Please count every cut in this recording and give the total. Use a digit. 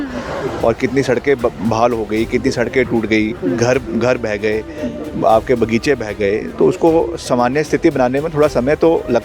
0